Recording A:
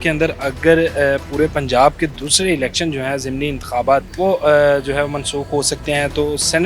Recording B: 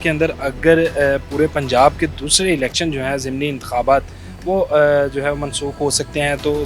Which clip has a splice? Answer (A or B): A